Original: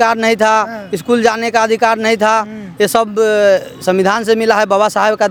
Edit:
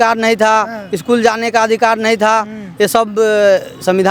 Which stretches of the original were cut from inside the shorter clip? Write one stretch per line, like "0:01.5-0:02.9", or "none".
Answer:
none